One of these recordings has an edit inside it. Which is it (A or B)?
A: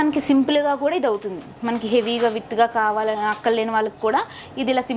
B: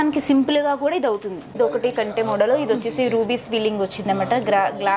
B